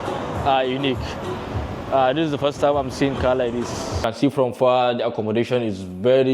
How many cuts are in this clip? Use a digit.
1